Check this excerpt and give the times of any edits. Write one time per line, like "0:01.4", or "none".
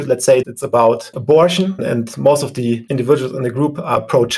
none